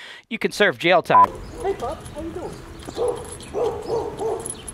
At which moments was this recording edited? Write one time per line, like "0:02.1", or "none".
0:01.1